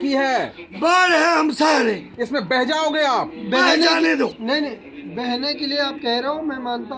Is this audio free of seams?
yes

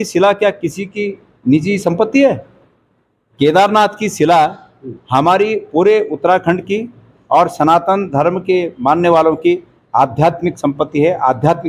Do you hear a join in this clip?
no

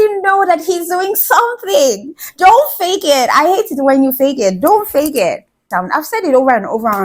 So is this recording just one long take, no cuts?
no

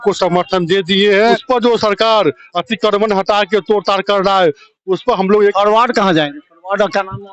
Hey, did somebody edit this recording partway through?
yes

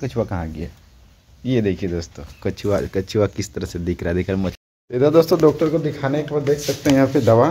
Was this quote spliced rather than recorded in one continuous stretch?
yes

